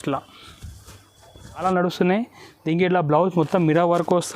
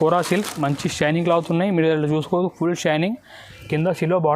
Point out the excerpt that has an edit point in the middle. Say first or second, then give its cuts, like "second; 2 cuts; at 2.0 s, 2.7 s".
first; 1 cut; at 1.6 s